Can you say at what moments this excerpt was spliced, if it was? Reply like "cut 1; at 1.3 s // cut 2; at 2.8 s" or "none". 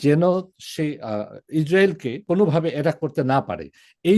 cut 1; at 2.2 s